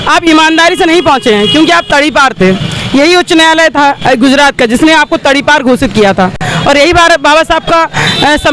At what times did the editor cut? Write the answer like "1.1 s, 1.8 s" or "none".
none